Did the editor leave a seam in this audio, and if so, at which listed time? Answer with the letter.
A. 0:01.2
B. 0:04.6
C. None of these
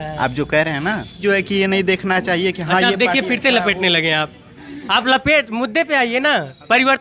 A